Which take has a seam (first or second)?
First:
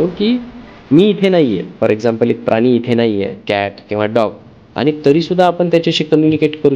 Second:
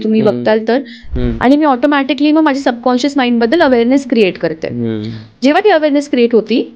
second